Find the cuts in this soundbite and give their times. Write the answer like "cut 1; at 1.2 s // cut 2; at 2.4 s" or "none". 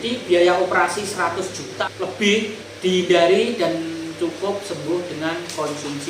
cut 1; at 1.7 s // cut 2; at 2.6 s